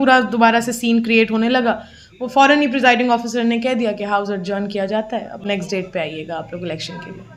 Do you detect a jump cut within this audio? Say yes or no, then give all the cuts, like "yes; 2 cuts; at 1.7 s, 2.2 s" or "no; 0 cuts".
no; 0 cuts